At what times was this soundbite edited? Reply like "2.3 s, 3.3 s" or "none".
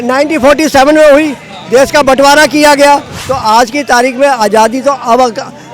3.2 s